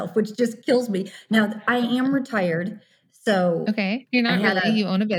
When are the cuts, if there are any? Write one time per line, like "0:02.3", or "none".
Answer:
0:04.0